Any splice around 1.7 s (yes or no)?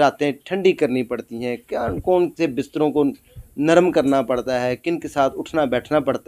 no